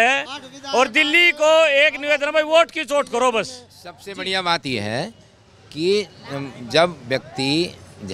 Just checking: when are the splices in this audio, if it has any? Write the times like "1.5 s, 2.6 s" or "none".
none